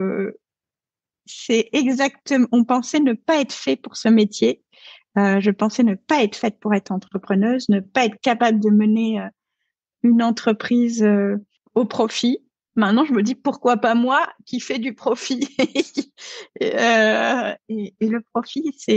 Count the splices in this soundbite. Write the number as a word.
two